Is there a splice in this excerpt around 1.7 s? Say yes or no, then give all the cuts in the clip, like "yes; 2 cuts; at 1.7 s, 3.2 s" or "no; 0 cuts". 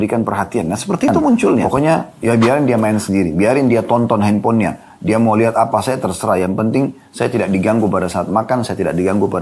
yes; 1 cut; at 1.7 s